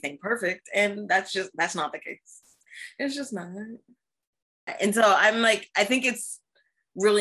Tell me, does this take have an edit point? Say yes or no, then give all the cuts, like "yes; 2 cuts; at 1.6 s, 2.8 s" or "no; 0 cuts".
yes; 1 cut; at 4.7 s